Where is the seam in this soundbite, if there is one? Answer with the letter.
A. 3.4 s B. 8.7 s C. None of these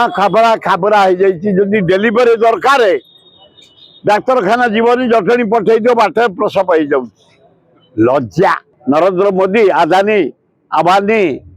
B